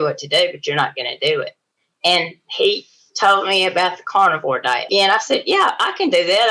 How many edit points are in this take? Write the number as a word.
one